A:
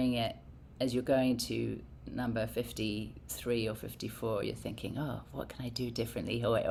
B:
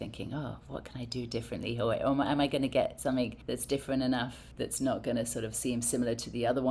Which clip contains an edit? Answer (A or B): B